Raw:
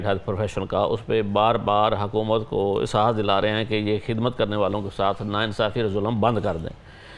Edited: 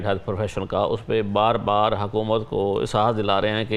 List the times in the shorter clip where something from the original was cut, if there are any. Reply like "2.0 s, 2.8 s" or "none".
none